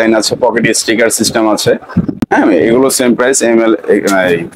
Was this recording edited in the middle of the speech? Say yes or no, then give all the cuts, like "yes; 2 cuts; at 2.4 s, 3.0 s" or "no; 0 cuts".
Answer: no; 0 cuts